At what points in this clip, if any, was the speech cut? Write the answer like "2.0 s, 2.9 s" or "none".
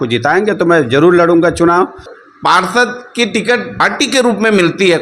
2.2 s, 3.8 s